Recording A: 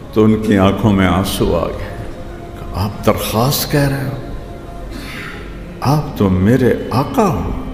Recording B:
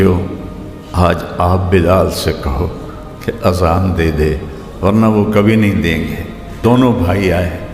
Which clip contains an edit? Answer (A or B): B